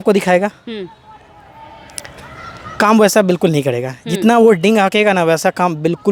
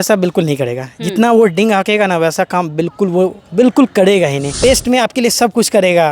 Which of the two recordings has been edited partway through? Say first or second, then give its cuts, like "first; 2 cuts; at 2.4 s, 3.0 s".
second; 1 cut; at 4.5 s